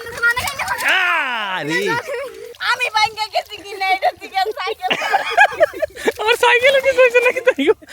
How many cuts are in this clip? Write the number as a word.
one